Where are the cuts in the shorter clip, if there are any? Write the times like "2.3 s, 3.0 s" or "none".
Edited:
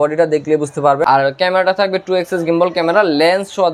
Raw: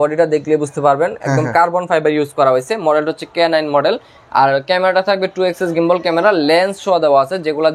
1.0 s